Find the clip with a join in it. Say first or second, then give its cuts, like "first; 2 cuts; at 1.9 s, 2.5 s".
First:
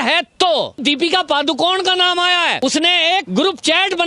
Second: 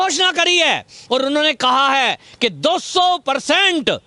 first; 2 cuts; at 0.8 s, 2.9 s